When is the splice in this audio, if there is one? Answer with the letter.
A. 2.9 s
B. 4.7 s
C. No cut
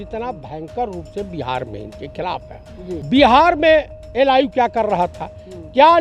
A